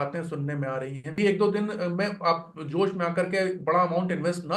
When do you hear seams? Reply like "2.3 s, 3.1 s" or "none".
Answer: 1.2 s

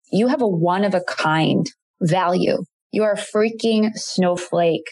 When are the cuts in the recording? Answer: 1.8 s, 2.8 s

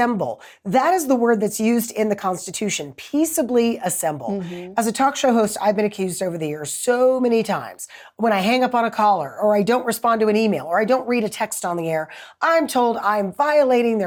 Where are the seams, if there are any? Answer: none

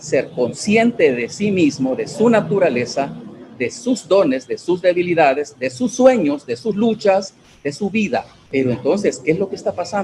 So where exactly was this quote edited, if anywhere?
8.4 s

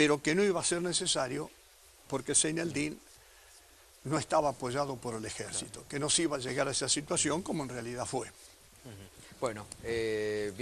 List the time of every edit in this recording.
5.7 s

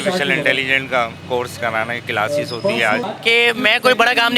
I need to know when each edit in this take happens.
3.1 s

